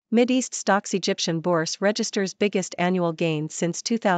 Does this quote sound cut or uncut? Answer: uncut